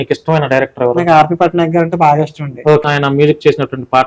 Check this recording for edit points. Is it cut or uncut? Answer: cut